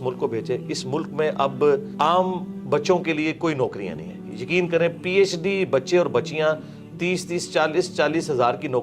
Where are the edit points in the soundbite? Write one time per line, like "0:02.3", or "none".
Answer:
0:01.9